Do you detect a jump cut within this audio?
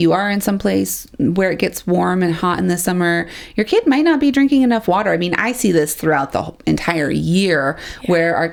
no; 0 cuts

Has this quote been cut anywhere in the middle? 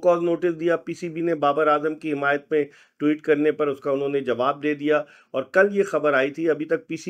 no; 0 cuts

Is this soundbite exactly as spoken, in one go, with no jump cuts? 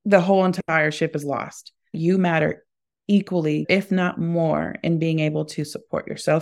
no; 2 cuts; at 1.9 s, 3.6 s

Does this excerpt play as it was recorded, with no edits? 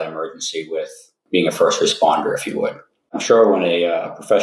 no; 2 cuts; at 1.1 s, 3.2 s

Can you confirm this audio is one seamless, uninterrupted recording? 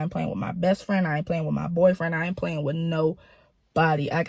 yes; 0 cuts

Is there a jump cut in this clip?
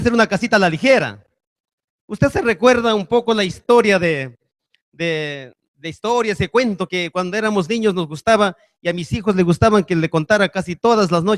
no; 0 cuts

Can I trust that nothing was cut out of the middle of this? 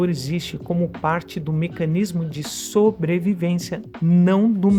yes; 0 cuts

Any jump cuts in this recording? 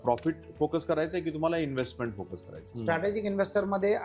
yes; 1 cut; at 2.7 s

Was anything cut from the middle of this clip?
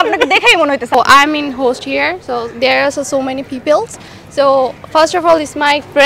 yes; 1 cut; at 0.9 s

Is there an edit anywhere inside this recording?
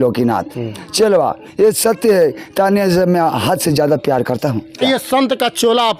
yes; 1 cut; at 4.8 s

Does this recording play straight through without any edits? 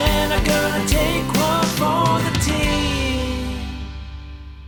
yes; 0 cuts

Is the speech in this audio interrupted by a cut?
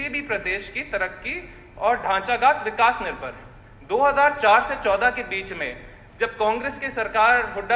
no; 0 cuts

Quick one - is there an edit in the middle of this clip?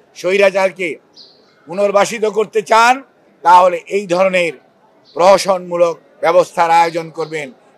no; 0 cuts

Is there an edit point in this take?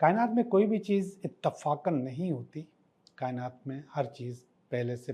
no; 0 cuts

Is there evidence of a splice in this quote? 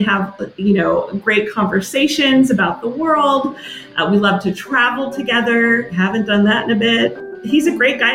yes; 1 cut; at 7.2 s

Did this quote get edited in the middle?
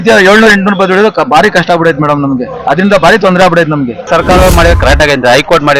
yes; 1 cut; at 4.1 s

